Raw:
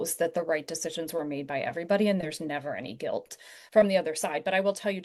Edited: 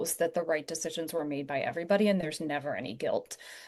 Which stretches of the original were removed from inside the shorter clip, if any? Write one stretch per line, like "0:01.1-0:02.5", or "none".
none